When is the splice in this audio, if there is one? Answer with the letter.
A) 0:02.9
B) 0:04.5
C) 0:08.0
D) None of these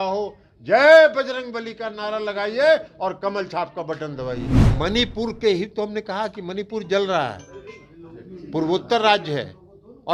B